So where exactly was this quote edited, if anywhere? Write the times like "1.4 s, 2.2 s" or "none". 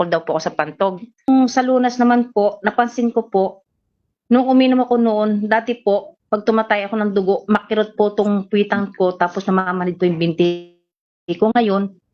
1.3 s

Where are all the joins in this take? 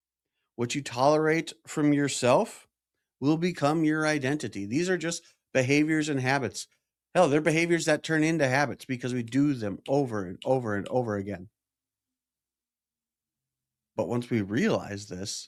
none

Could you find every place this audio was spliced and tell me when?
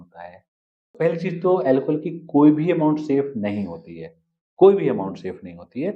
0.9 s

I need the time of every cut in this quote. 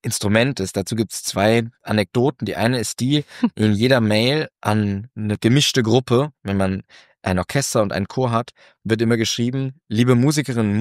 none

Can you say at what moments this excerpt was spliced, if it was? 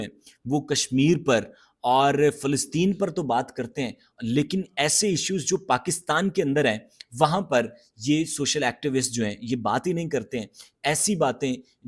none

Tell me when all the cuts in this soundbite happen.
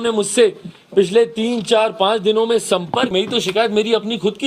3.1 s

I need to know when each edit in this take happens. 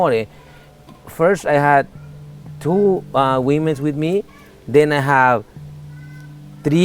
none

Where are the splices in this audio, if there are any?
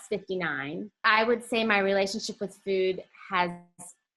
1.0 s

